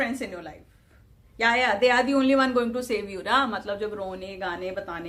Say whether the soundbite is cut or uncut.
uncut